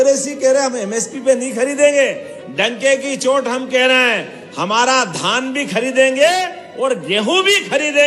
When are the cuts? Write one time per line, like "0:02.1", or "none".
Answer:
none